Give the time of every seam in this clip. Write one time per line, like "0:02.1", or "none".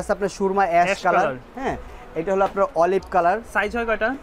none